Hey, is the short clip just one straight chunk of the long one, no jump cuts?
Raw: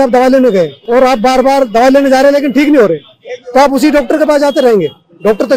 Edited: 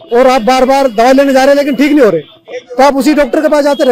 yes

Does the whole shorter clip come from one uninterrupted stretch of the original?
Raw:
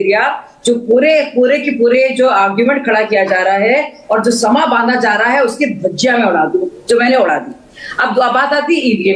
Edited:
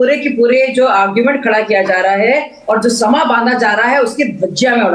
yes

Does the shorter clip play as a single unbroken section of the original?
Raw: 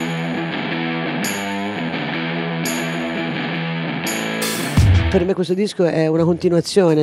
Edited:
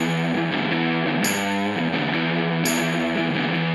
yes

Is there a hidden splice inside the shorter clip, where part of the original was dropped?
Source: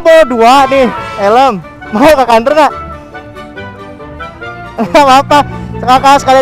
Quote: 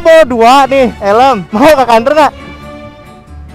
yes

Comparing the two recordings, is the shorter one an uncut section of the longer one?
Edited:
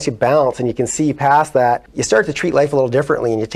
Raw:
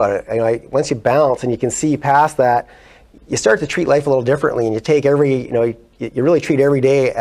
no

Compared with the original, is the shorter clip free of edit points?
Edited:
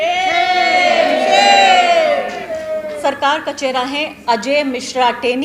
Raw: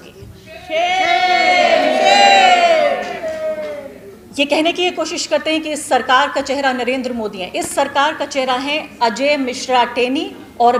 no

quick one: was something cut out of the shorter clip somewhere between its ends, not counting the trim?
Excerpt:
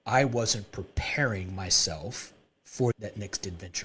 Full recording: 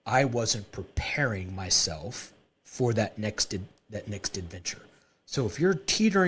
yes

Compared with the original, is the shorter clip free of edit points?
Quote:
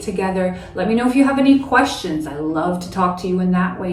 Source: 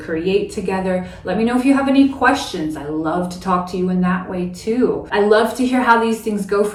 yes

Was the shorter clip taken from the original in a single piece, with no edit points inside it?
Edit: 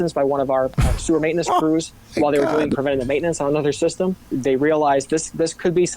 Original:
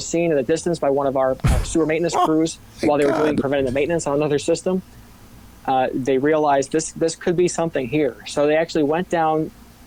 no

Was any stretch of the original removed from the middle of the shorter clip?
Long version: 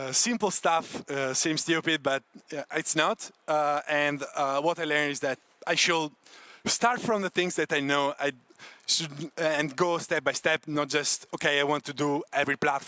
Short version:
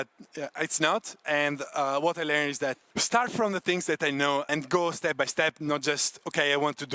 yes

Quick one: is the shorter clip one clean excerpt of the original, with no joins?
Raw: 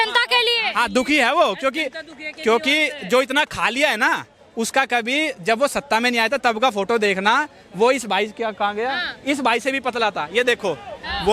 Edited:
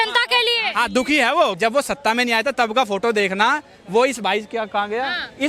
no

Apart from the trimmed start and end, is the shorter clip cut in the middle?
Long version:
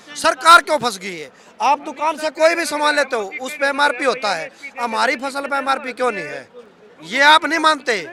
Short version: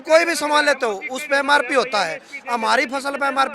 no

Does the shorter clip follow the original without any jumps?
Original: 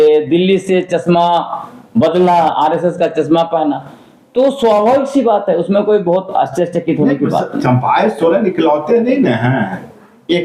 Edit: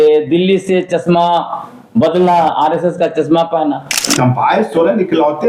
no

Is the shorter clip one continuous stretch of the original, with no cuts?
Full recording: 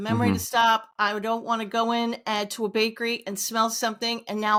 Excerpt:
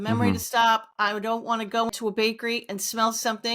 no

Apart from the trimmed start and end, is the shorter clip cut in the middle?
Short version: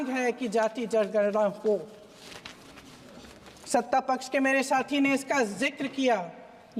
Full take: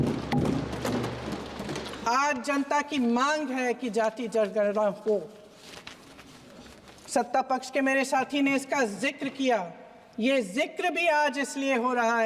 no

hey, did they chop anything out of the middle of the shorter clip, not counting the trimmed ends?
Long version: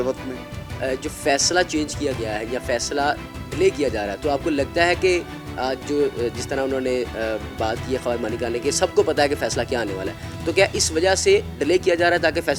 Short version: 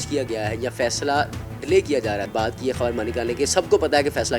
yes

